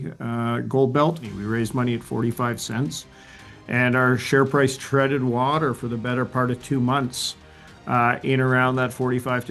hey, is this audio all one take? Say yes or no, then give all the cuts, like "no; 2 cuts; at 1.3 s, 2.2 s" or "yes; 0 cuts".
no; 1 cut; at 1.3 s